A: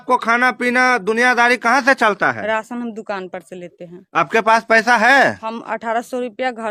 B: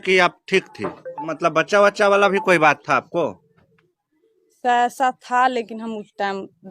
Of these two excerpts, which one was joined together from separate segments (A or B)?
B